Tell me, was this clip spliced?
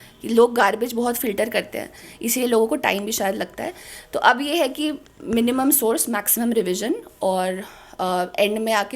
no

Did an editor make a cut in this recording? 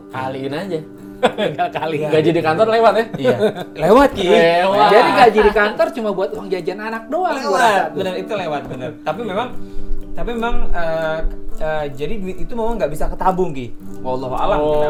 no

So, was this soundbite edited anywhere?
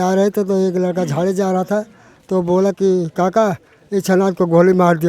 no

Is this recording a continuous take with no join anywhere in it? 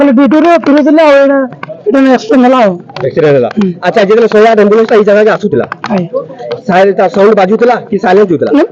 yes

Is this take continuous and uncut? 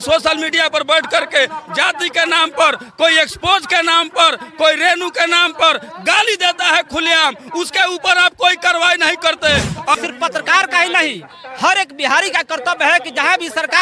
no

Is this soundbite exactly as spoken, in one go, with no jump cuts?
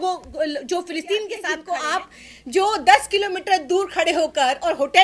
no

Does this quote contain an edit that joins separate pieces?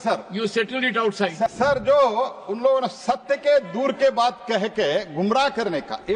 yes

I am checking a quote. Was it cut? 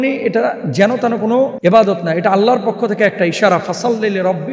yes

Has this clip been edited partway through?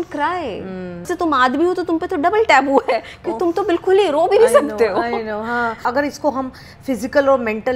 yes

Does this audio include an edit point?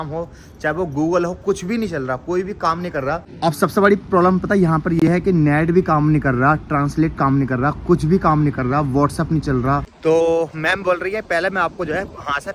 yes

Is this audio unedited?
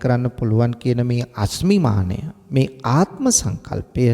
yes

